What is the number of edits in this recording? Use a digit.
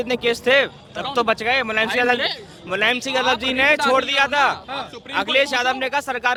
0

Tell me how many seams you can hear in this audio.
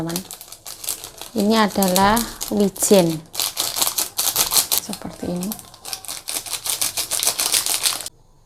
0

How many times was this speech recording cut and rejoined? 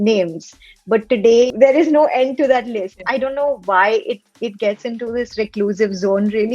2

